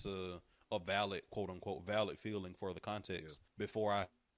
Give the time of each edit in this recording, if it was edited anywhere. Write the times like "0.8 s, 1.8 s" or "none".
3.4 s